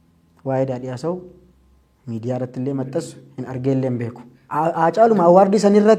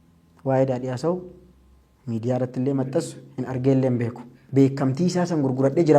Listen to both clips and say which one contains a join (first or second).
second